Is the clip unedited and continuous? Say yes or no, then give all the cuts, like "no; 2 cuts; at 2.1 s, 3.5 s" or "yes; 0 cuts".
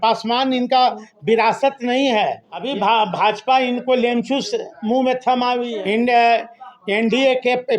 no; 2 cuts; at 2.5 s, 5.7 s